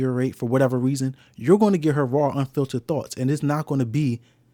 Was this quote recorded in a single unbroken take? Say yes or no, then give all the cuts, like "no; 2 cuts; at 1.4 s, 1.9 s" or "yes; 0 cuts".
yes; 0 cuts